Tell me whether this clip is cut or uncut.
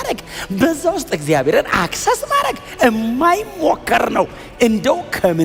uncut